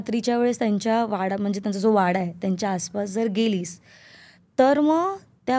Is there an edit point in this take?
no; 0 cuts

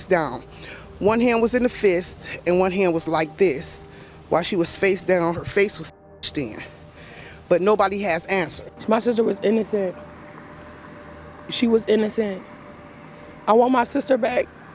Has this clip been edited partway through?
yes; 1 cut; at 8.7 s

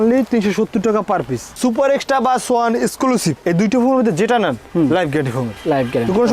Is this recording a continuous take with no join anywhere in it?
no; 1 cut; at 1.5 s

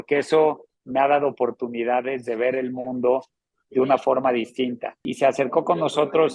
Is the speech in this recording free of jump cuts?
no; 1 cut; at 5.1 s

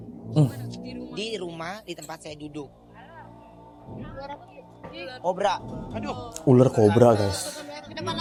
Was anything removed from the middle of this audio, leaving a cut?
no; 0 cuts

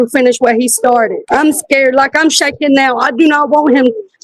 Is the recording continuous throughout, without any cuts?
yes; 0 cuts

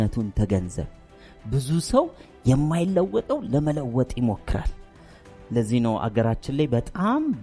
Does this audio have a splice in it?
no; 0 cuts

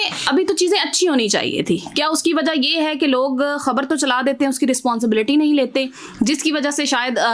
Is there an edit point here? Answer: no; 0 cuts

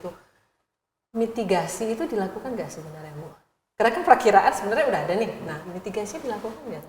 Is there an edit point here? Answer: no; 0 cuts

